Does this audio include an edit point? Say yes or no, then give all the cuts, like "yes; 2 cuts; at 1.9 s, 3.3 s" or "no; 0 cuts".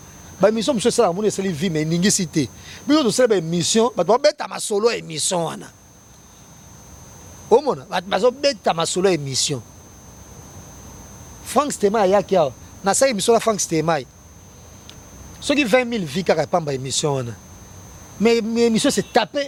no; 0 cuts